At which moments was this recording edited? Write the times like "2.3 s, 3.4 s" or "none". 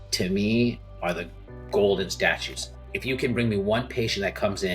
2.8 s

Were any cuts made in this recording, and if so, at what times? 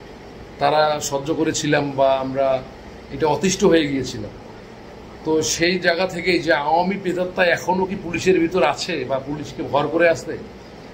none

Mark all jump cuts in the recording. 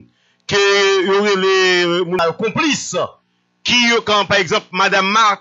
2.2 s

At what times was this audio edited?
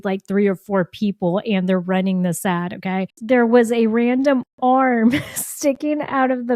3.1 s

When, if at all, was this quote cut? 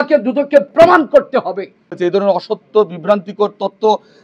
2.0 s

